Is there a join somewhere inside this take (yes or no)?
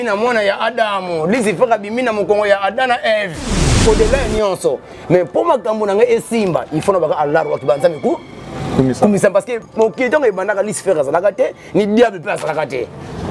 yes